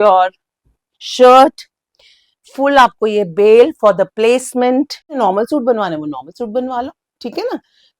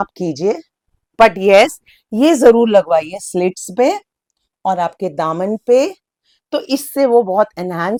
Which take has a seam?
first; 1 cut; at 5.2 s

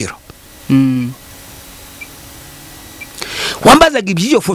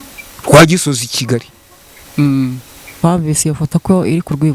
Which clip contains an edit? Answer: second; 1 cut; at 2.9 s

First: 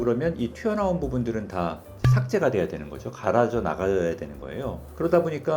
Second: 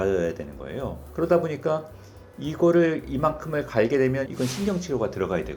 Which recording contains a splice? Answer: second; 1 cut; at 4.2 s

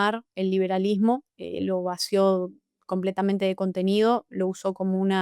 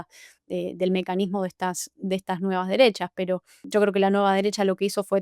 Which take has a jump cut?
second; 1 cut; at 3.5 s

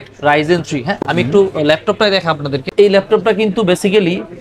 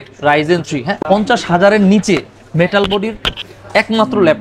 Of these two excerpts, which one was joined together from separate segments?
second; 1 cut; at 0.9 s

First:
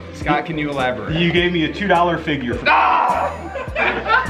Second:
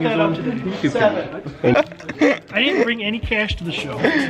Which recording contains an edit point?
second; 1 cut; at 1.7 s

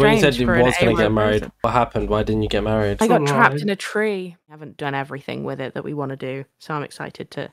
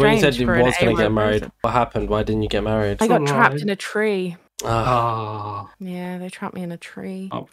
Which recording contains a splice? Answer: first; 1 cut; at 4.6 s

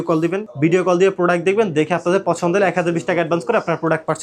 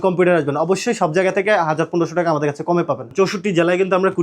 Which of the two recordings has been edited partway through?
second; 1 cut; at 3.1 s

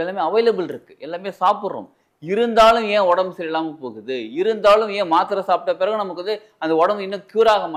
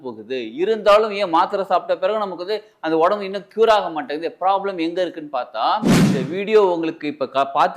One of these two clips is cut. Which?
second; 1 cut; at 6.0 s

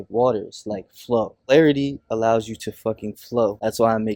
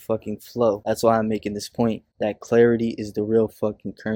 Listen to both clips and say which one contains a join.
first; 1 cut; at 1.5 s

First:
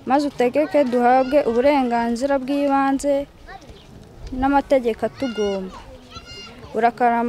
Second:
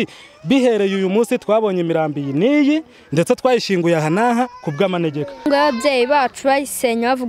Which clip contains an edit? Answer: second; 1 cut; at 5.5 s

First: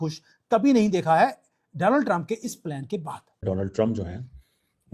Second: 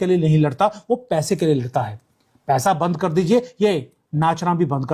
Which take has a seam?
first; 1 cut; at 3.4 s

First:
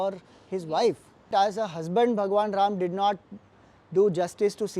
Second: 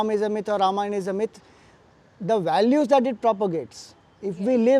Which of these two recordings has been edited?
first; 1 cut; at 1.3 s

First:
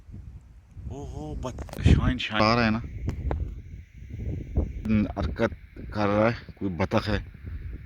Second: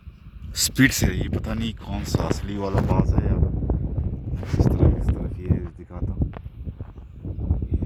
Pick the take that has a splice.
first; 1 cut; at 4.9 s

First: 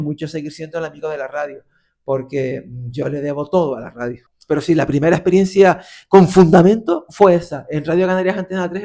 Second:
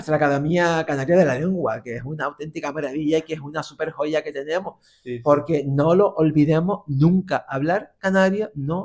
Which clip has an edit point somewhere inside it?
first; 1 cut; at 4.3 s

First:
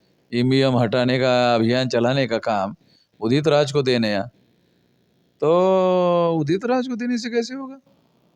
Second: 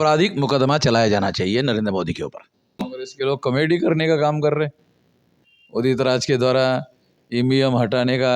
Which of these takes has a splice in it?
second; 1 cut; at 2.9 s

